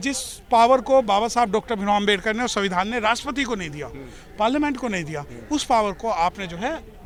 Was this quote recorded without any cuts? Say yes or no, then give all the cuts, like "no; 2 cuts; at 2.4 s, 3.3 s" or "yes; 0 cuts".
yes; 0 cuts